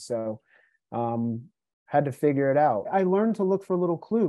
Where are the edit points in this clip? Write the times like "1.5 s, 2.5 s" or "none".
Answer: 2.9 s